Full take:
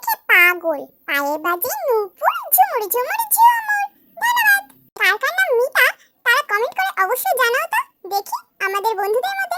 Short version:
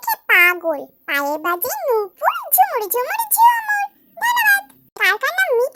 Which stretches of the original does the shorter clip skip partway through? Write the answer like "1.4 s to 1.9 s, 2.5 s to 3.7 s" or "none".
none

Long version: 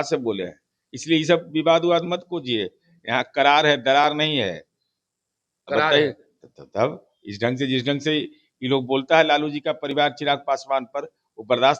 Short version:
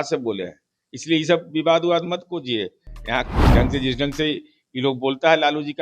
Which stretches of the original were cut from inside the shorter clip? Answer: 3.3 s to 7.2 s

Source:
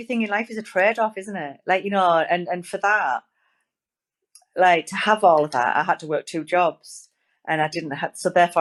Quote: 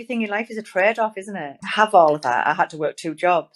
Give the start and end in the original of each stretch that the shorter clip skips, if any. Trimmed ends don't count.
1.6 s to 4.9 s

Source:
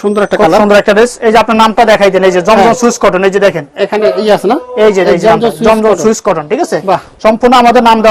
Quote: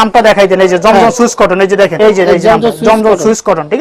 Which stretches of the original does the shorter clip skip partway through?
3.6 s to 4.7 s

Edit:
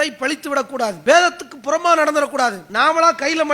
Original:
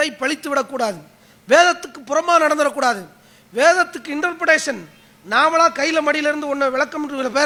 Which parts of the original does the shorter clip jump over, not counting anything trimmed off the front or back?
1.0 s to 1.4 s, 3.1 s to 5.2 s

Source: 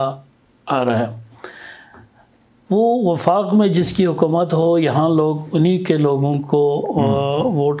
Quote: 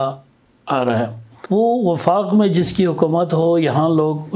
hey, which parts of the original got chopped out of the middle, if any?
1.3 s to 2.5 s

